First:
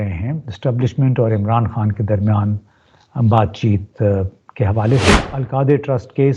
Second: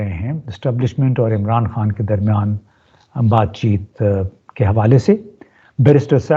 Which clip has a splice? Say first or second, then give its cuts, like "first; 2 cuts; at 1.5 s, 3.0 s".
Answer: first; 1 cut; at 5.3 s